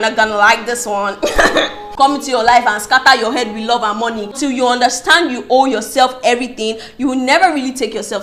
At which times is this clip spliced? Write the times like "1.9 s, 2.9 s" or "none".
1.8 s, 4.4 s